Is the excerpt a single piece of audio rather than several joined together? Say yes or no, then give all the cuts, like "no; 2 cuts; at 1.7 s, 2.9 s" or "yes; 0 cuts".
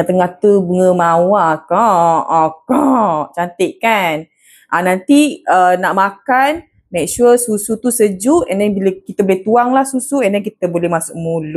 yes; 0 cuts